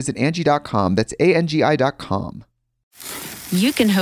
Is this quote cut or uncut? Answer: cut